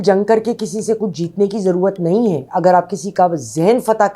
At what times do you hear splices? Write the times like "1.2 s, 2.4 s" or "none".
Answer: none